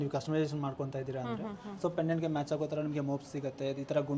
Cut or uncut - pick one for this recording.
uncut